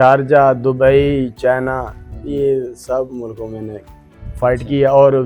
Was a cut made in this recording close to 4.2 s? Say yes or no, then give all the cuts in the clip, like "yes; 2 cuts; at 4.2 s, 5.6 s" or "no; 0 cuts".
no; 0 cuts